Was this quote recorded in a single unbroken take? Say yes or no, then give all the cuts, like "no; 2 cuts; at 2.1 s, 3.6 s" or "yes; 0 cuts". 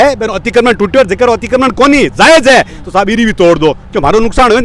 yes; 0 cuts